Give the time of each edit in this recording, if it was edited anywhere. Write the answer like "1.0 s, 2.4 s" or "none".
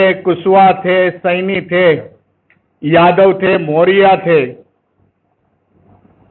none

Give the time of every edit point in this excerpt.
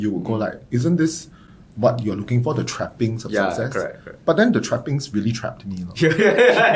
none

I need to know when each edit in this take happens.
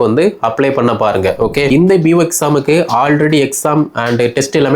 1.7 s

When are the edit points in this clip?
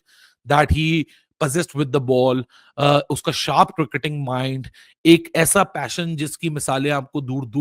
none

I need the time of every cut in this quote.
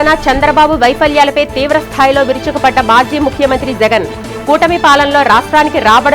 none

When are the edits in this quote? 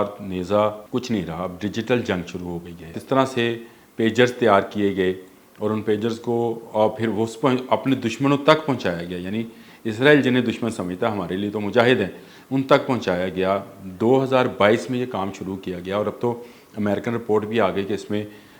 0.8 s, 3.0 s

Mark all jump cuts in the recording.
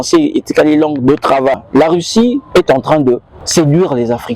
1.6 s, 3.4 s

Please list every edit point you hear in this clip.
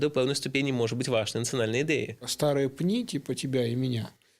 2.3 s

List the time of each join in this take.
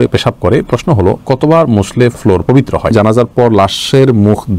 2.9 s

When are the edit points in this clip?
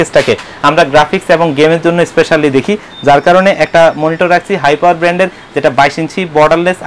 none

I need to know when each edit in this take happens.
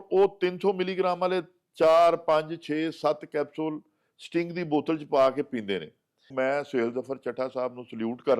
6.3 s

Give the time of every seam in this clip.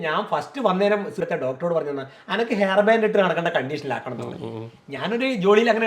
1.2 s

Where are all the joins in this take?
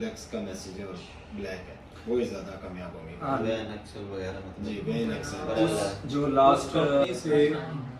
5.3 s, 6.0 s, 7.0 s

